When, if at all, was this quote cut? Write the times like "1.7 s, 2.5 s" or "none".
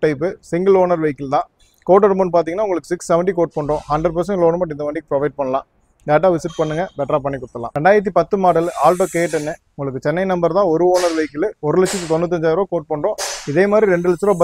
7.6 s